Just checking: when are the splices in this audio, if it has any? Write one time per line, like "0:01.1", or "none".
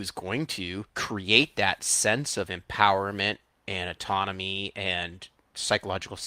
0:00.9